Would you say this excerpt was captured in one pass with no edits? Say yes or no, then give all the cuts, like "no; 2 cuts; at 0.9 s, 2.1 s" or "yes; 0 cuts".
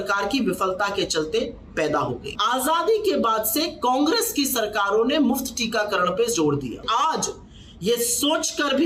no; 2 cuts; at 2.3 s, 6.8 s